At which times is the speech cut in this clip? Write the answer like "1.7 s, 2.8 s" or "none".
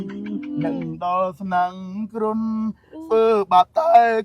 none

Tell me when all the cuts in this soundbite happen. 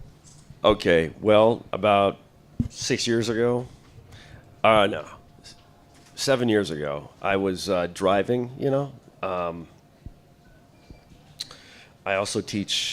9.3 s

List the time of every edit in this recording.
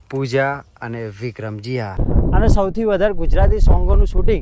2.0 s

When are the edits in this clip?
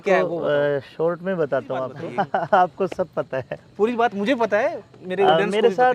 2.0 s

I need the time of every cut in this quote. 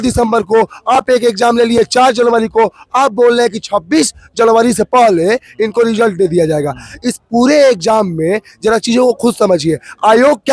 none

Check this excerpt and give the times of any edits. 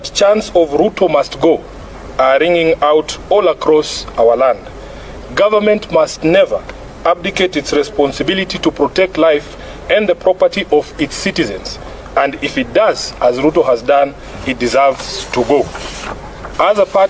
none

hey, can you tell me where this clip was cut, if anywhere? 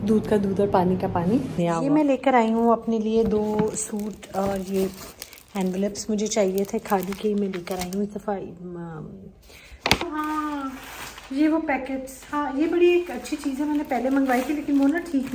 1.6 s, 10.0 s

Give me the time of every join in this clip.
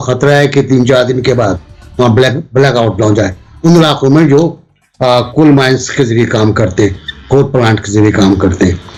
none

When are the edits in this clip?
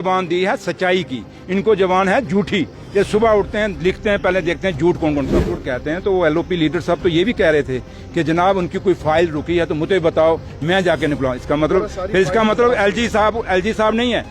5.7 s

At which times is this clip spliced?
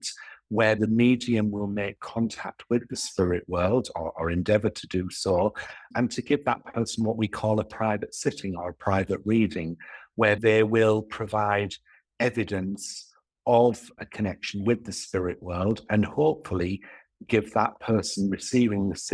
0.8 s, 5.9 s, 10.4 s

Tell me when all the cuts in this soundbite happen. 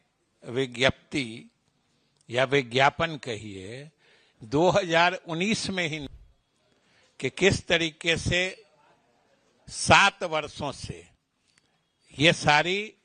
6.1 s

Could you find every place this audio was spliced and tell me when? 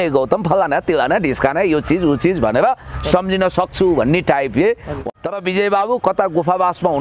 5.0 s

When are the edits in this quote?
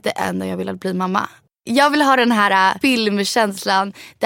1.6 s, 2.8 s

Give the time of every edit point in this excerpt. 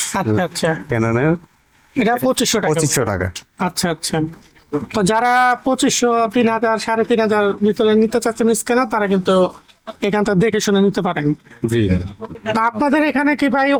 none

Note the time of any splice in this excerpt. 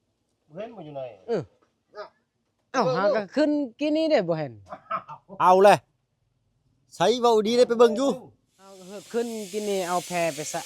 8.9 s

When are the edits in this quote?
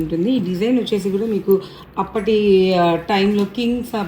none

